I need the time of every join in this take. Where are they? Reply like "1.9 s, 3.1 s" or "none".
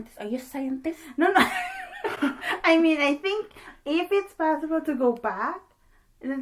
none